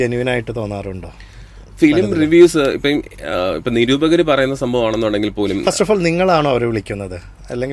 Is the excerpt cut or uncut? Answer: uncut